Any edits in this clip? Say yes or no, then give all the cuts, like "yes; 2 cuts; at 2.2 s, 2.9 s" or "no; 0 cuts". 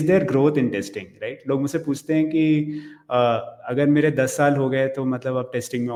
no; 0 cuts